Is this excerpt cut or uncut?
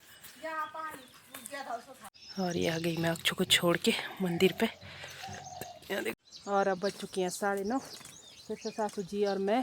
cut